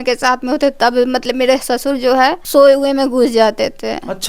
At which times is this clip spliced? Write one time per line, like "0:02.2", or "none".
0:02.4